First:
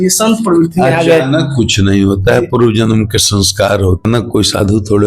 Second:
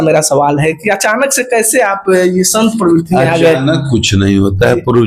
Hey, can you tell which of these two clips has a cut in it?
first; 1 cut; at 4.1 s

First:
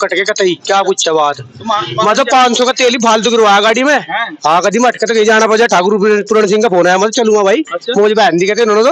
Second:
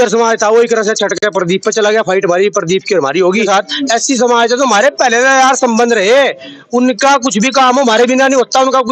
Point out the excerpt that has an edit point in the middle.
second; 1 cut; at 3.5 s

